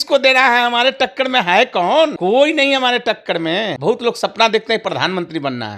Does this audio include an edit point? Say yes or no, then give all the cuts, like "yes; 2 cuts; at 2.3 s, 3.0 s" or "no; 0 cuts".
yes; 2 cuts; at 2.2 s, 3.7 s